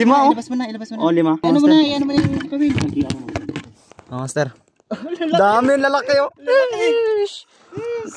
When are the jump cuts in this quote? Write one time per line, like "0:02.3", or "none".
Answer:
0:01.4